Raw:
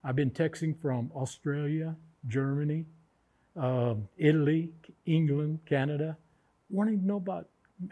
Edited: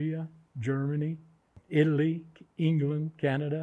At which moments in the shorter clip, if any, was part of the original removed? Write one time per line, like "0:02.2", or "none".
0:01.6